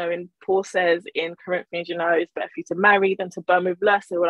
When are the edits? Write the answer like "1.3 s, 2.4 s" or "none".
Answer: none